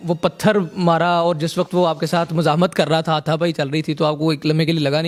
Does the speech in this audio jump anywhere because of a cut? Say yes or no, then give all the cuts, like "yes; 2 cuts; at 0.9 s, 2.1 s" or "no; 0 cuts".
no; 0 cuts